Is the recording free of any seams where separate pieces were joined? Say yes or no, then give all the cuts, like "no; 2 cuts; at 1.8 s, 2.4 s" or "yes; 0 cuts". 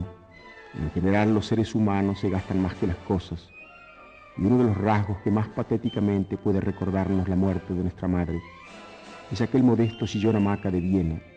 yes; 0 cuts